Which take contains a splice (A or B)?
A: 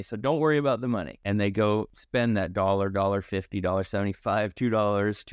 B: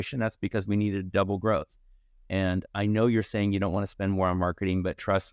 A